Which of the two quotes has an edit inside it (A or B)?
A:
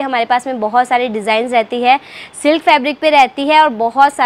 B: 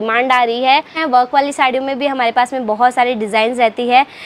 B